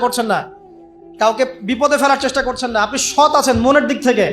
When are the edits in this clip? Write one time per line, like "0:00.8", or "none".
none